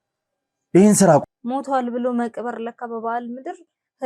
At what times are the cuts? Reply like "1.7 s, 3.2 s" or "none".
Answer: 1.2 s

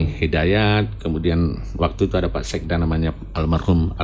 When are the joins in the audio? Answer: none

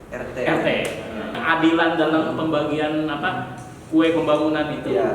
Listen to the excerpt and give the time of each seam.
1.4 s

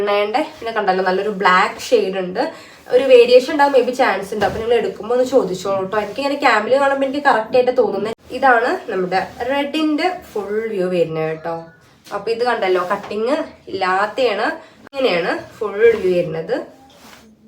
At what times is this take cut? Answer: 8.1 s, 14.9 s

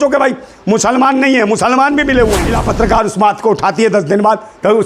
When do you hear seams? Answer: 2.5 s

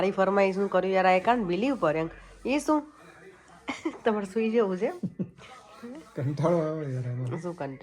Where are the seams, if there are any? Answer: none

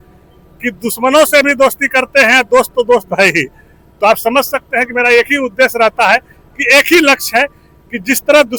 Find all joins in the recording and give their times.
none

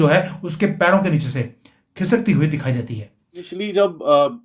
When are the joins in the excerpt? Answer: 3.5 s

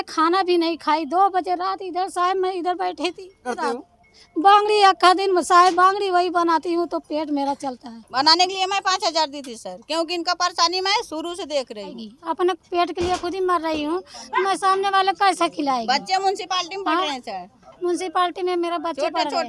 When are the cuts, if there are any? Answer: 3.6 s, 8.0 s, 12.0 s

